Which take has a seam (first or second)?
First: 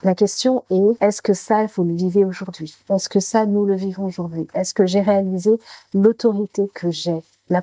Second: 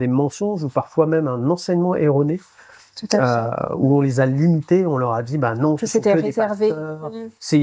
first